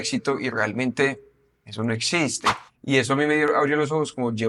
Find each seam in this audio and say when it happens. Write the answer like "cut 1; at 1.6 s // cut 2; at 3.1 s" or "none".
cut 1; at 2.5 s